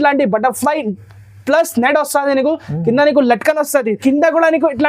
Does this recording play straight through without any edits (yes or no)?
no